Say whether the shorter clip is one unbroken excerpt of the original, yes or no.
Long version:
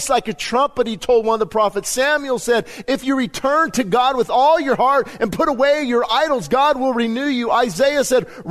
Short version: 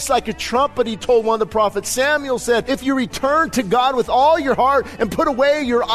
no